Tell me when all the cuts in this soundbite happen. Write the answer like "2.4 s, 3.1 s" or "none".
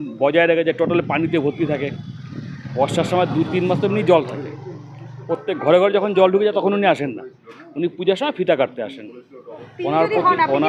none